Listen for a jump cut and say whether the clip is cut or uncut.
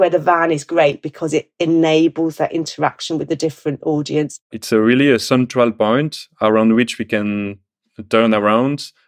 cut